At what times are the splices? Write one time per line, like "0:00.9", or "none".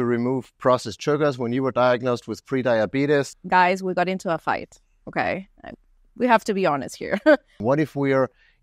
0:03.3
0:07.6